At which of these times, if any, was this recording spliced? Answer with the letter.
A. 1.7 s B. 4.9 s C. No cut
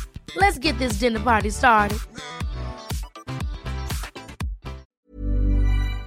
B